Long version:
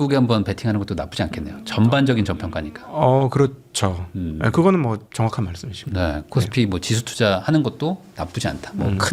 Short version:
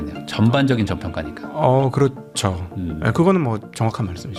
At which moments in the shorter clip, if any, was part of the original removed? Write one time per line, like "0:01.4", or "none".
none